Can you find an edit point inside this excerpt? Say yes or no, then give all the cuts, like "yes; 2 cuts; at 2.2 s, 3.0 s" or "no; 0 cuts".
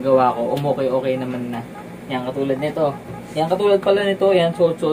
no; 0 cuts